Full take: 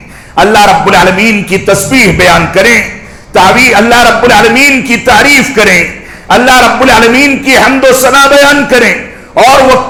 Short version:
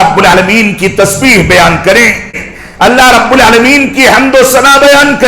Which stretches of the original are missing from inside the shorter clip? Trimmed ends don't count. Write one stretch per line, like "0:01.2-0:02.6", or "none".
0:03.1-0:05.9